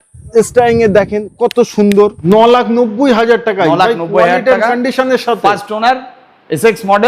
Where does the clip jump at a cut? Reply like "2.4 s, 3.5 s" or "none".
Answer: 2.2 s